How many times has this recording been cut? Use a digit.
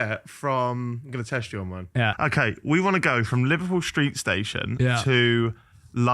1